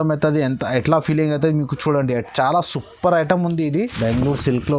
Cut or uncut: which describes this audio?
cut